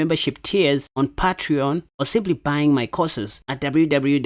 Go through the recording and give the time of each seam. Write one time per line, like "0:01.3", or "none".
0:03.3